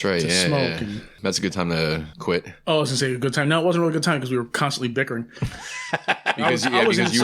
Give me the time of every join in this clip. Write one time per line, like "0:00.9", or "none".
0:01.2
0:02.1